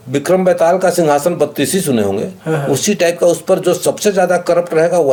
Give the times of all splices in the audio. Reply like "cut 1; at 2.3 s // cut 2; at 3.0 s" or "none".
none